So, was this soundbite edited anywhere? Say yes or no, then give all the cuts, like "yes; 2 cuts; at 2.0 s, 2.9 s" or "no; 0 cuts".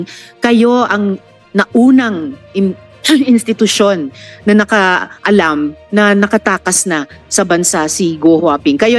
no; 0 cuts